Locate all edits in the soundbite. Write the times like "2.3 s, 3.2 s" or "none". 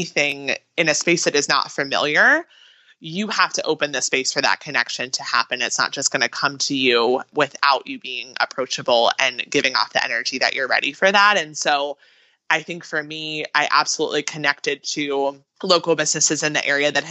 7.3 s, 15.5 s